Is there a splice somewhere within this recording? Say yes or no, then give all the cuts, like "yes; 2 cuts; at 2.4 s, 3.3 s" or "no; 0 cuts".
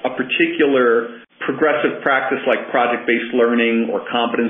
yes; 1 cut; at 1.2 s